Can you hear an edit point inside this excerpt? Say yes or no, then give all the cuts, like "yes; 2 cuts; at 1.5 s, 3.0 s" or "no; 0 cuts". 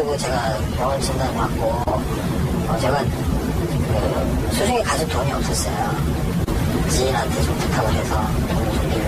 yes; 1 cut; at 5.6 s